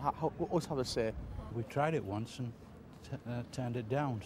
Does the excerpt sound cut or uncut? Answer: cut